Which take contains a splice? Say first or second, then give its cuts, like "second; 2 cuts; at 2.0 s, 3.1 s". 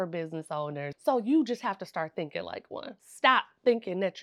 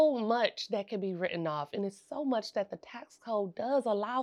first; 2 cuts; at 0.9 s, 3.0 s